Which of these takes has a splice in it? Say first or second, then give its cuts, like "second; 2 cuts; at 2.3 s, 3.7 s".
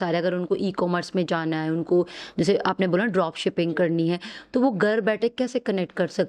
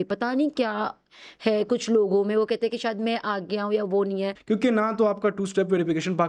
second; 1 cut; at 4.3 s